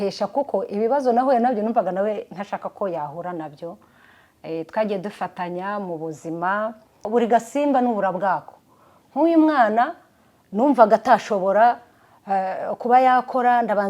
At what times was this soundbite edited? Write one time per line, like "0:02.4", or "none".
0:07.1